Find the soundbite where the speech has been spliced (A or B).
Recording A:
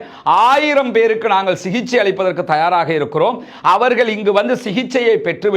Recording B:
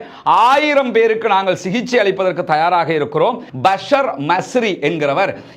B